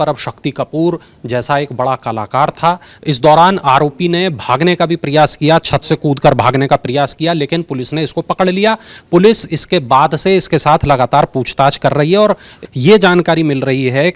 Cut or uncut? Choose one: cut